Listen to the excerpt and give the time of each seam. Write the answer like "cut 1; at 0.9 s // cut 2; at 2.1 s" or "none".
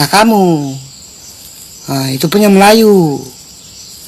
none